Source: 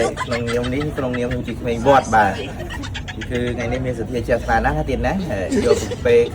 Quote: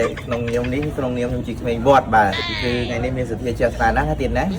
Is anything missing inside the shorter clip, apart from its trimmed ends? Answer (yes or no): yes